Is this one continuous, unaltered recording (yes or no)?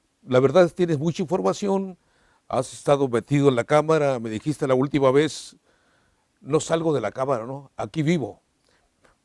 no